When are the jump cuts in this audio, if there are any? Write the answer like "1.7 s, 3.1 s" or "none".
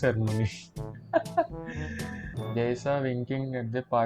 2.4 s